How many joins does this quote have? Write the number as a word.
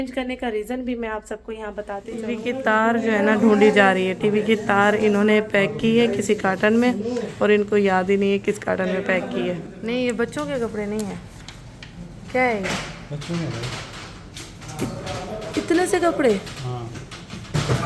two